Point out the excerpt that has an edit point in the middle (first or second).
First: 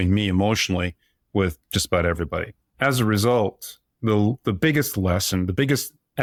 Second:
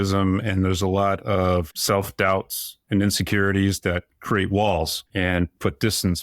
second